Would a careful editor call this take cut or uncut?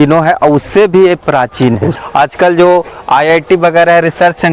cut